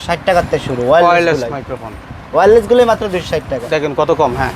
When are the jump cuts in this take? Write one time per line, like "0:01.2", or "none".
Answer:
none